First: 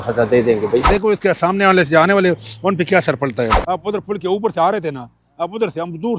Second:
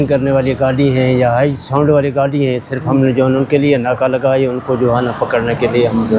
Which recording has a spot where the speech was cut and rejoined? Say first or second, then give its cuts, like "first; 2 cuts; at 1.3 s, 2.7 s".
first; 2 cuts; at 0.9 s, 3.6 s